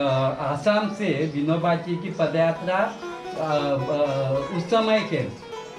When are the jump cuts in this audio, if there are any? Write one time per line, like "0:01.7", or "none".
none